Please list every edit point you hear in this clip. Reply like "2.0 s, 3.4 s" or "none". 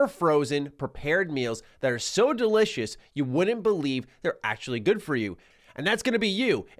5.5 s